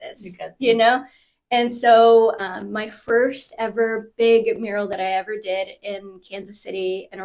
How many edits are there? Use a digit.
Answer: 1